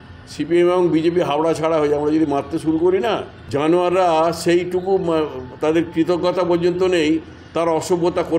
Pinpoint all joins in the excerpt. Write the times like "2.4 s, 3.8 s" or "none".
3.4 s